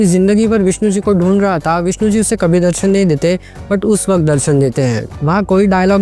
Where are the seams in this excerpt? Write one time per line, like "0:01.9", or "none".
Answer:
0:05.1